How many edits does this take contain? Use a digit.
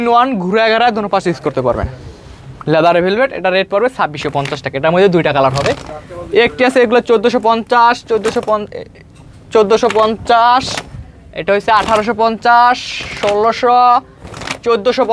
0